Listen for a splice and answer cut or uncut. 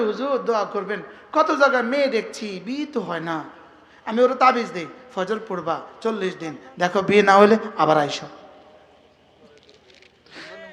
uncut